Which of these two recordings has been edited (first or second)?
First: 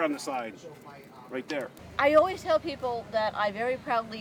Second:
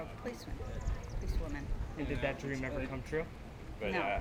first